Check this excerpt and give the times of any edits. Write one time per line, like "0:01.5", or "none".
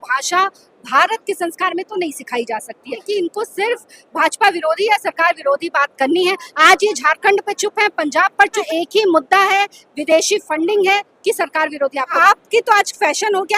0:03.0
0:08.7
0:12.1